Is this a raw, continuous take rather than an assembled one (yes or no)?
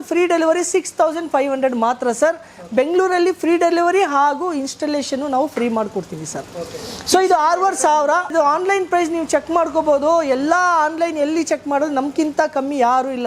yes